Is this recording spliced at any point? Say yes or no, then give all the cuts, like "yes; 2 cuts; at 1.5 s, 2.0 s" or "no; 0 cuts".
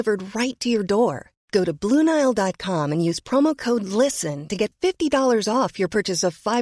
no; 0 cuts